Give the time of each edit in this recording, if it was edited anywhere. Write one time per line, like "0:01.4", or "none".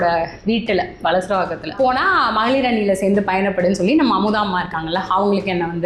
0:01.7